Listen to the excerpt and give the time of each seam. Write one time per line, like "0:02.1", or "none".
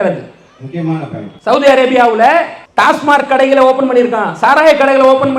0:01.3
0:02.6